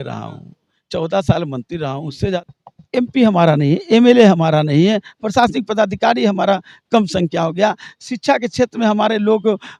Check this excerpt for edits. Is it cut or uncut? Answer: cut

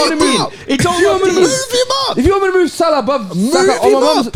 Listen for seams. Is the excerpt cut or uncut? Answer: uncut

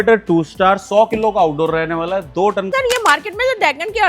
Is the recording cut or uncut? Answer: cut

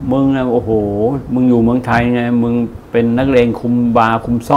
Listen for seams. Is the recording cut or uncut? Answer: uncut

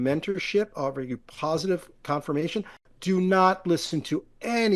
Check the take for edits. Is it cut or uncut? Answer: cut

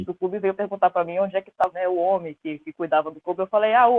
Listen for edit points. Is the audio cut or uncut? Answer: cut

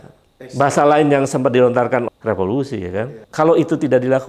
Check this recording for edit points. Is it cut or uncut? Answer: cut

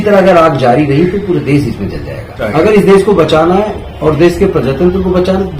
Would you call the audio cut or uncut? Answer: cut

